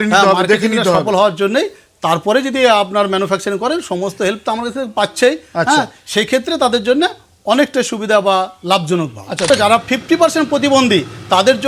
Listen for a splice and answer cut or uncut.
cut